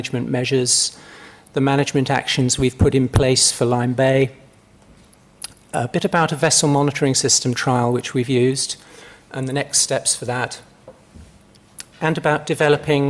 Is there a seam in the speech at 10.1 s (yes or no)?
yes